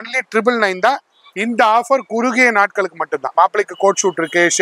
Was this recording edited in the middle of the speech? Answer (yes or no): yes